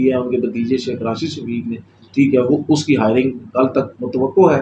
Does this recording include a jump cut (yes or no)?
no